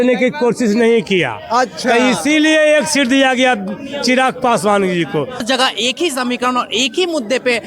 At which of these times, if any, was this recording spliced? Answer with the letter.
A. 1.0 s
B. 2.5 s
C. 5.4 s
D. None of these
C